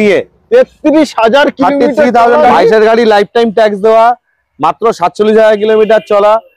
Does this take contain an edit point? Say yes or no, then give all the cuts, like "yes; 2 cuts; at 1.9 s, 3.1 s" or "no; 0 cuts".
yes; 1 cut; at 2.4 s